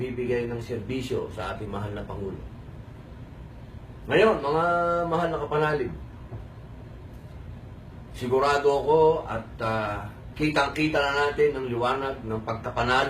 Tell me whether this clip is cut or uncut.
cut